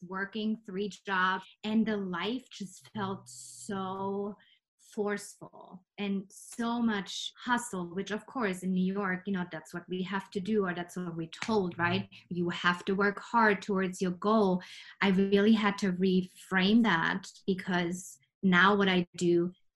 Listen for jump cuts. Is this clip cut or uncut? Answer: cut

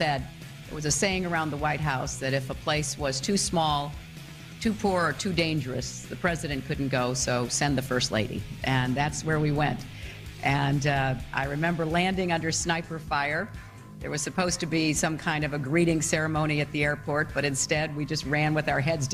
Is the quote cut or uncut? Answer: cut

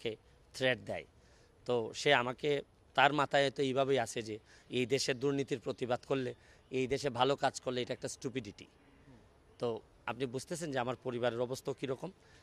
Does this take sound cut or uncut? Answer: uncut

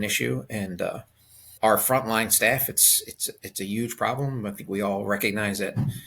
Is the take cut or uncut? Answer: cut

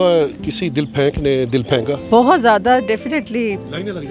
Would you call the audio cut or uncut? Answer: cut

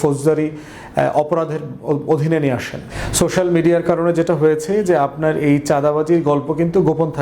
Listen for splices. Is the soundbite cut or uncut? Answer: cut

